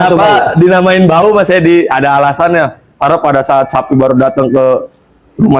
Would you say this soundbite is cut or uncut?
uncut